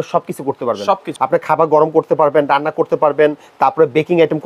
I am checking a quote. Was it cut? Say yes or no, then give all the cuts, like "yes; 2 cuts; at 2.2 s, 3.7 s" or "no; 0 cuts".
yes; 1 cut; at 1.1 s